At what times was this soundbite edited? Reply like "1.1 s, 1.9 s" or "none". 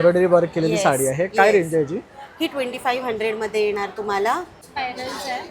4.6 s